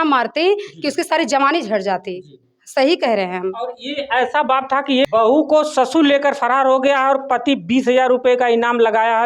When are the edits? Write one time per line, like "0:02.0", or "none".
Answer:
0:05.1